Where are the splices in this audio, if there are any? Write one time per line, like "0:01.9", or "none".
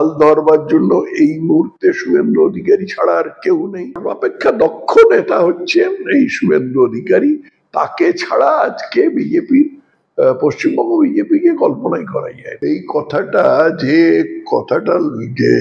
0:04.1
0:12.4